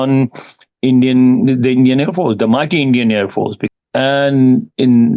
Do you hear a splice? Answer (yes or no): yes